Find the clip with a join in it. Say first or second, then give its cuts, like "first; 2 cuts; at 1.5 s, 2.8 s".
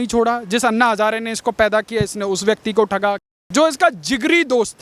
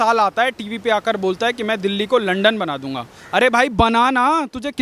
first; 1 cut; at 3.2 s